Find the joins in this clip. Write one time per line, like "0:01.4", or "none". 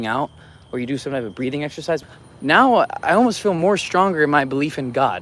0:02.0